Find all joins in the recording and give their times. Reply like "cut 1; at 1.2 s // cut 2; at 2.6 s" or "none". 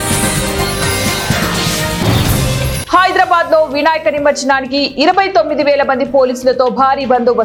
none